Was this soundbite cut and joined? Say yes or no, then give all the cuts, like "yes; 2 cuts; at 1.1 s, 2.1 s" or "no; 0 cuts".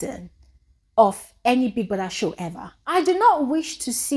yes; 1 cut; at 2.9 s